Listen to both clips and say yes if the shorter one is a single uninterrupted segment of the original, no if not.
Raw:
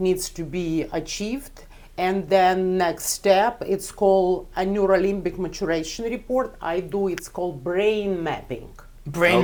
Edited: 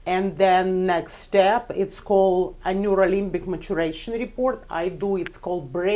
yes